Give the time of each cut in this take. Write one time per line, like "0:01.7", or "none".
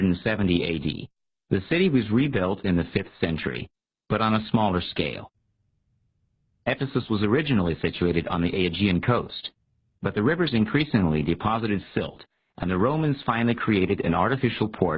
0:07.6